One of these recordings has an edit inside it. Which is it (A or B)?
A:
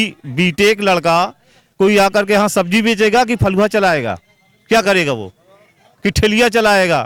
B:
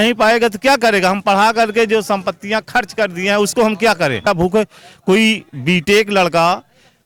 B